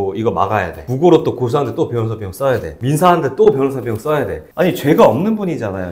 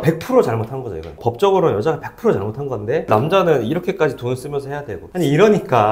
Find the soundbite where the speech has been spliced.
first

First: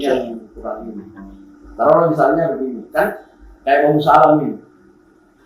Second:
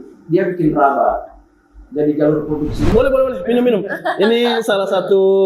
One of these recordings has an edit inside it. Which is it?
second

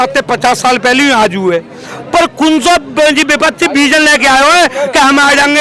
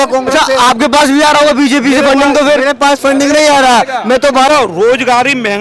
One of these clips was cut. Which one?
second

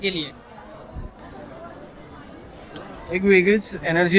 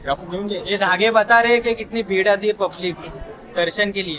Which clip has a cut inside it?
first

